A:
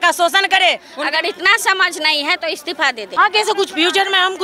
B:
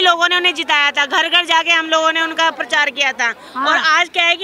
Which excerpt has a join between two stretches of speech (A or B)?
A